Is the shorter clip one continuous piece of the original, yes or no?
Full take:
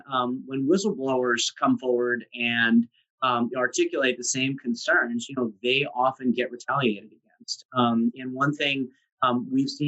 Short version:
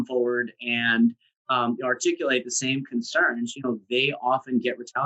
yes